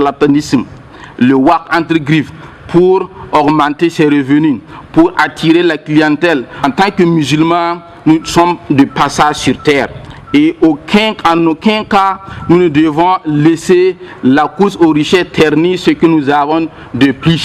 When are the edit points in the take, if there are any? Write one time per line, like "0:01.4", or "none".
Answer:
0:06.6